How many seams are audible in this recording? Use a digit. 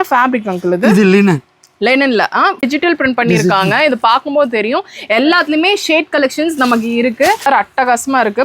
2